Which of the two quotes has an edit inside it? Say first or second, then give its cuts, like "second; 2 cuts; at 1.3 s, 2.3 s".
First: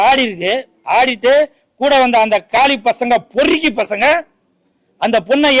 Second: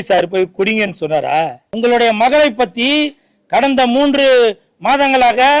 second; 1 cut; at 1.6 s